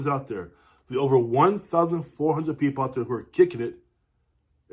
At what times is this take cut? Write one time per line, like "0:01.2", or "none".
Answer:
none